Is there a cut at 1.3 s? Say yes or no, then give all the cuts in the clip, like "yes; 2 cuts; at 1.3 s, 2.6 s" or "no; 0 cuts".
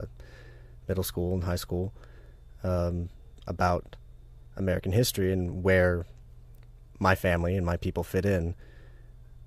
yes; 1 cut; at 1.3 s